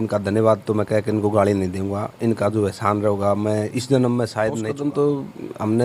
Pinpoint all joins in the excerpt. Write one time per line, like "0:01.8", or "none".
0:04.7